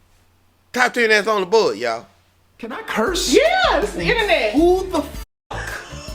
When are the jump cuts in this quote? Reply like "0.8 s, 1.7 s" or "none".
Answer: 2.8 s